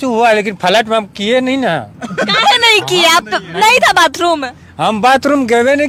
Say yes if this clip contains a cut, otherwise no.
no